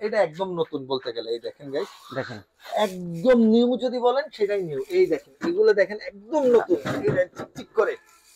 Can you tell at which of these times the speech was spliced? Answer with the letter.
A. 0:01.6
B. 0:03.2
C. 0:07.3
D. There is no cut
D